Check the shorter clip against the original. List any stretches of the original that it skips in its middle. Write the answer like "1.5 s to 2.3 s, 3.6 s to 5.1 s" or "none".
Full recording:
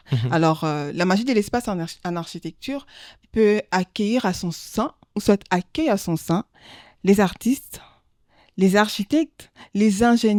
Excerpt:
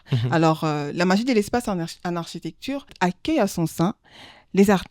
2.9 s to 5.4 s